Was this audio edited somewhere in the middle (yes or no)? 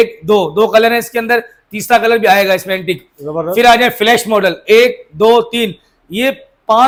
no